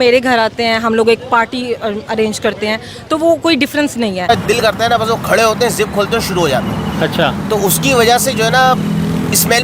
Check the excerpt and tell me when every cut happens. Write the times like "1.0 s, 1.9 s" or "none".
4.3 s